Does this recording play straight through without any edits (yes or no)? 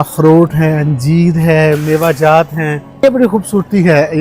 no